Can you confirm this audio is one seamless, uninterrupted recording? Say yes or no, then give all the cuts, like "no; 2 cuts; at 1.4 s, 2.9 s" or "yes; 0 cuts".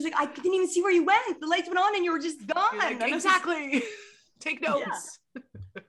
yes; 0 cuts